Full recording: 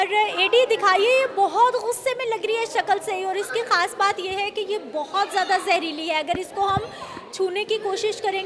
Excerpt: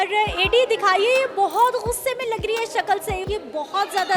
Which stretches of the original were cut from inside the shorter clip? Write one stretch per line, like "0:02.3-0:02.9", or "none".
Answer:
0:03.2-0:04.6